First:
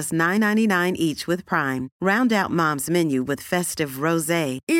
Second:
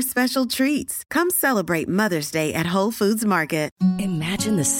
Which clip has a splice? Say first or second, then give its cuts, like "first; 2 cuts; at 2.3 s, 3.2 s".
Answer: second; 1 cut; at 3.7 s